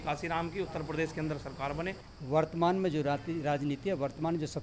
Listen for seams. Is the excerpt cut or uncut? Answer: cut